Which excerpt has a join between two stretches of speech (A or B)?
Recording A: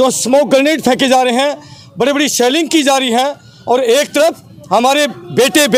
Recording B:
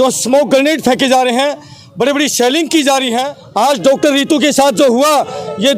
B